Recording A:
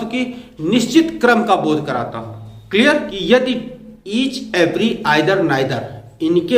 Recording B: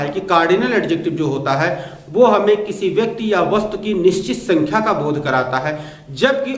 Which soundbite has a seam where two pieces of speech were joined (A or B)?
A